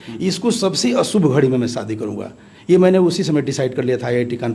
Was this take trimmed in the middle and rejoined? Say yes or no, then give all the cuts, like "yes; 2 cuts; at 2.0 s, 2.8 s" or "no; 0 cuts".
no; 0 cuts